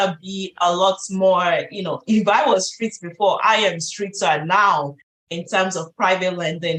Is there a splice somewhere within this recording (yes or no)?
no